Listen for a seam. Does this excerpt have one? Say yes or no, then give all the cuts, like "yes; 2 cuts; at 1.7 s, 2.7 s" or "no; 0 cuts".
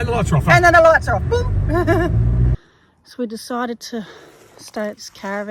yes; 1 cut; at 2.5 s